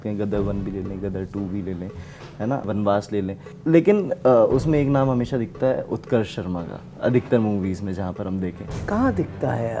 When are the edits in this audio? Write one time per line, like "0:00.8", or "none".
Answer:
0:02.7
0:03.5
0:08.7